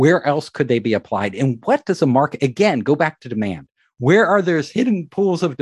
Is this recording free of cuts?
yes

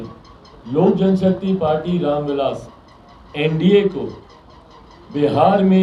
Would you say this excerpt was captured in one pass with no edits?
yes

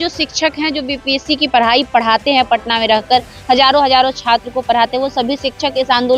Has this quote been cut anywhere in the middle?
no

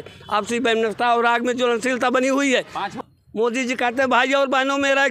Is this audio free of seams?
no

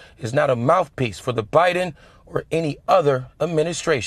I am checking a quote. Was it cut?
no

